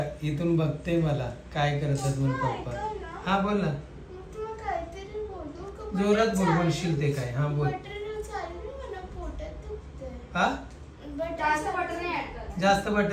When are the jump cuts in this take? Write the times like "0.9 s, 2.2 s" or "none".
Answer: none